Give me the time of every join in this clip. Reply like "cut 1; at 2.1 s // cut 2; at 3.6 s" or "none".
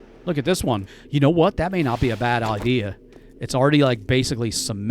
cut 1; at 0.9 s